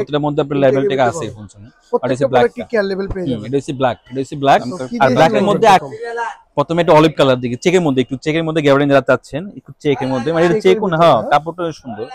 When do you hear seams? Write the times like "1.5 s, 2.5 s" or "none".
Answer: 5.8 s